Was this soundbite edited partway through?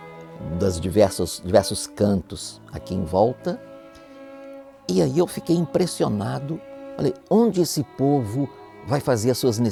no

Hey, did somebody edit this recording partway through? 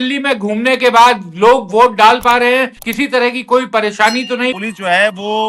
yes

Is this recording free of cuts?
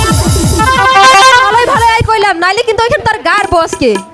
no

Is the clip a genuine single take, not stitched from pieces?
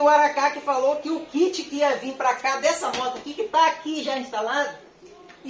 yes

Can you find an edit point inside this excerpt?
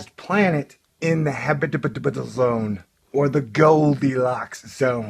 no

